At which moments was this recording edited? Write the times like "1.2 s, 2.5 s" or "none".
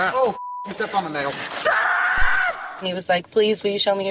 2.7 s